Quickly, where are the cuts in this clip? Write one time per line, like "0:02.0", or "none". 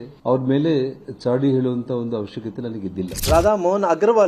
none